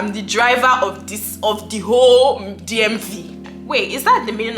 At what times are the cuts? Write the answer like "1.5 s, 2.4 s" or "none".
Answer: 3.5 s